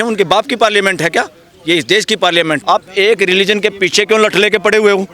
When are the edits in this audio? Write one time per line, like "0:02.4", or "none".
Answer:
0:02.6